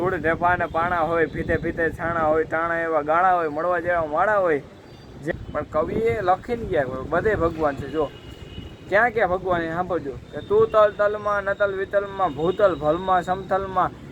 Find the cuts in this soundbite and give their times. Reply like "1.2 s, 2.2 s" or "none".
5.2 s